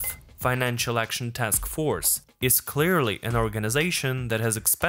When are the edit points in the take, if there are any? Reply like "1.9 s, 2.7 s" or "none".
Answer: none